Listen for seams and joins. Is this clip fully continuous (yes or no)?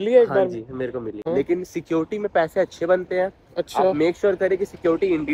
no